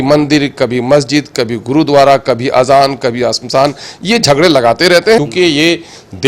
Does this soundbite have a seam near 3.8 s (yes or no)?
no